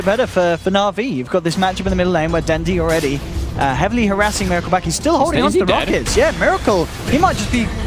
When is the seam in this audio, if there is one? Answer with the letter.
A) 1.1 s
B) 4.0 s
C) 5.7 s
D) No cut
D